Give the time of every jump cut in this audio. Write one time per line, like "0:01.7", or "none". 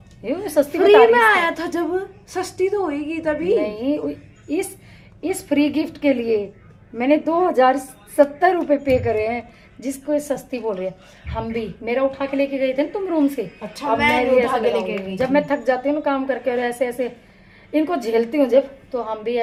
none